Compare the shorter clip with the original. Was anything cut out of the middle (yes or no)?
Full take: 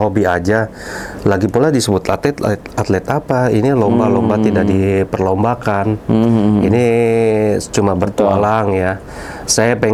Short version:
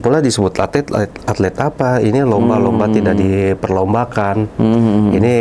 no